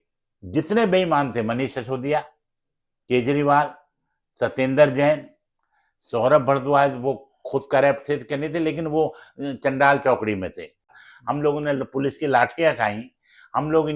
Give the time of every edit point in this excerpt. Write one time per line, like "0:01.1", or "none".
0:11.0